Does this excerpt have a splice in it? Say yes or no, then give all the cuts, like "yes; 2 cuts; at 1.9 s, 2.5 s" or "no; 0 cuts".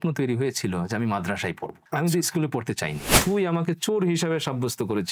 yes; 2 cuts; at 1.7 s, 3.2 s